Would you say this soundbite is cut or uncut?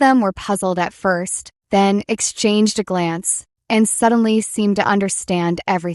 uncut